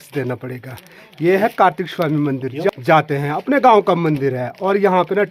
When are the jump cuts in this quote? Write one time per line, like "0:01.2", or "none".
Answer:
0:02.7